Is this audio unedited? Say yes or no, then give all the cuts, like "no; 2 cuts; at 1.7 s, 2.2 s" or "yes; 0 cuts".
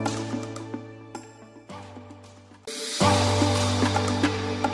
no; 1 cut; at 2.5 s